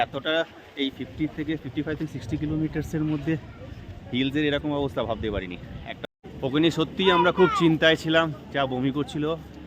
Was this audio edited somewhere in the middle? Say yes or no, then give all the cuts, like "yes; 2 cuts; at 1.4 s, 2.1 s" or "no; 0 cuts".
yes; 1 cut; at 6.1 s